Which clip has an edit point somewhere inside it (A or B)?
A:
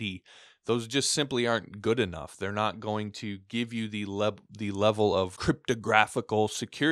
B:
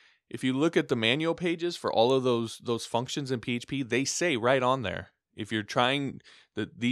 A